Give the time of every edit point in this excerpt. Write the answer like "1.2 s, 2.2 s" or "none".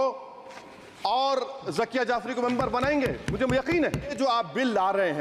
4.1 s